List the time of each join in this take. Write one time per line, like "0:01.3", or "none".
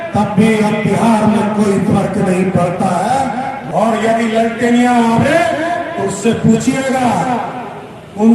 0:03.7